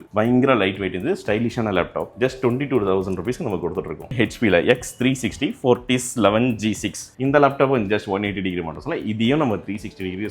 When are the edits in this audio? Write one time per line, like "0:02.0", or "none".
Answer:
0:02.1
0:04.1
0:07.1